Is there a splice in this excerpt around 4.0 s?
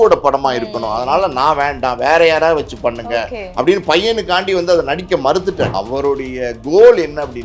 no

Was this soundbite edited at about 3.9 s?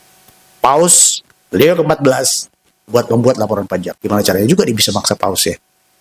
yes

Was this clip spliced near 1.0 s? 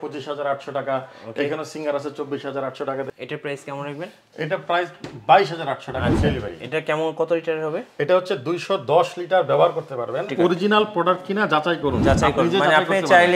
no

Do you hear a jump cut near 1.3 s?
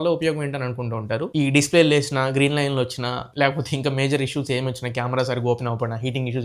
yes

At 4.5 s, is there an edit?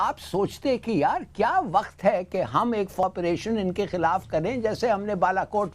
no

